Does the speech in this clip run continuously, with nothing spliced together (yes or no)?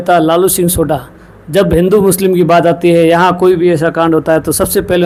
yes